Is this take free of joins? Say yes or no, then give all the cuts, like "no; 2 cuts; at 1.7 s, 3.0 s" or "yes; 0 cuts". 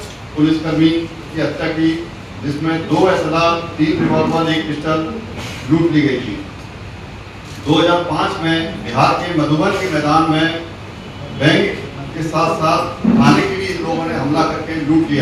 yes; 0 cuts